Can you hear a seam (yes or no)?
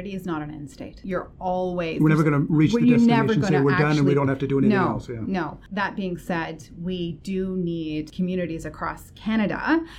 yes